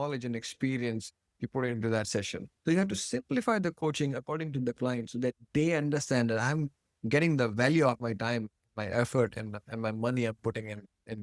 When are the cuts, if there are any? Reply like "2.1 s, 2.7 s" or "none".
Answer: 2.4 s